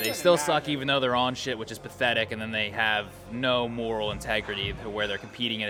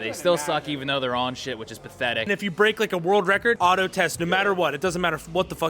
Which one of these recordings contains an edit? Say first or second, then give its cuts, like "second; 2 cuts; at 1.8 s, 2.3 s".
second; 2 cuts; at 2.2 s, 3.6 s